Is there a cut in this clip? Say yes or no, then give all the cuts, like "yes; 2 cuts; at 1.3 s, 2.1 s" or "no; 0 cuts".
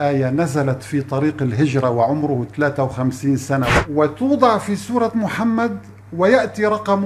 yes; 1 cut; at 3.8 s